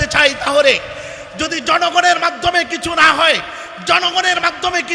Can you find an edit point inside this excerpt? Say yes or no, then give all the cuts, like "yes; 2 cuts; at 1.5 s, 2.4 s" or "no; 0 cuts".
no; 0 cuts